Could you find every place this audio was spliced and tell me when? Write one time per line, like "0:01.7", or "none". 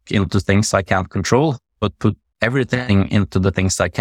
0:02.3